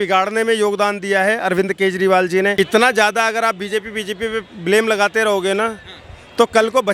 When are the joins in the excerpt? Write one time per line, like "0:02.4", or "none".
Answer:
0:02.5

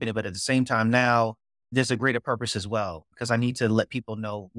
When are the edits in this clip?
0:01.6

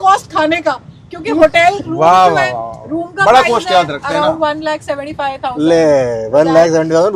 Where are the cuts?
none

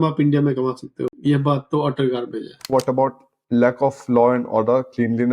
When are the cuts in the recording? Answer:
0:01.1
0:02.7

